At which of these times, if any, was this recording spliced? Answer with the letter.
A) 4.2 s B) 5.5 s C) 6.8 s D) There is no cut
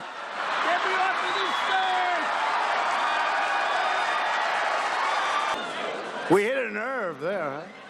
B